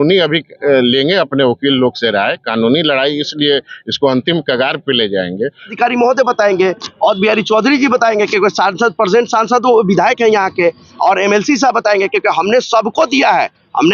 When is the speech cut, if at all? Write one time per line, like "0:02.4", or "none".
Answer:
0:05.7